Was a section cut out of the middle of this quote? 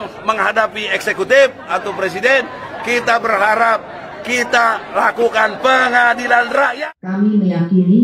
yes; 1 cut; at 6.8 s

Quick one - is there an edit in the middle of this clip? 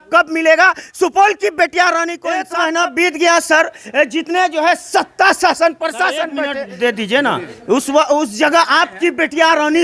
yes; 2 cuts; at 2.5 s, 6.3 s

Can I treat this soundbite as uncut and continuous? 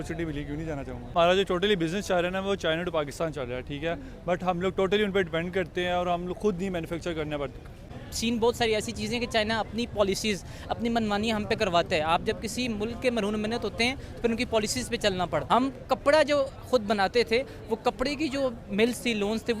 no; 3 cuts; at 1.1 s, 8.0 s, 15.4 s

